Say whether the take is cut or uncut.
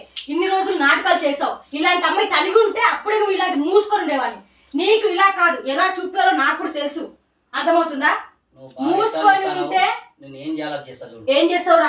uncut